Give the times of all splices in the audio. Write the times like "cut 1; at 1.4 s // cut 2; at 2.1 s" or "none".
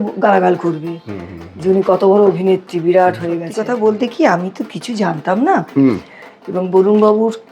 cut 1; at 3.5 s